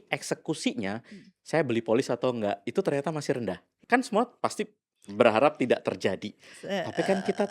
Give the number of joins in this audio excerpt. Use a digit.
1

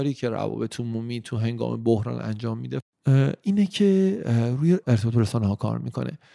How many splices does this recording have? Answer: 2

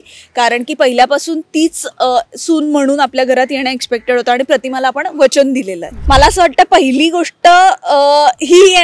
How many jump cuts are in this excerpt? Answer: 1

